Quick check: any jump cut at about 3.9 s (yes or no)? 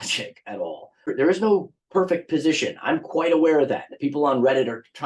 no